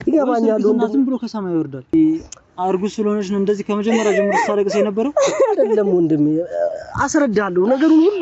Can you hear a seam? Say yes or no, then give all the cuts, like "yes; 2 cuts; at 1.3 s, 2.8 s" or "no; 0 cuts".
yes; 1 cut; at 1.9 s